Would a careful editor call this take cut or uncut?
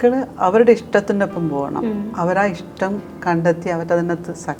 uncut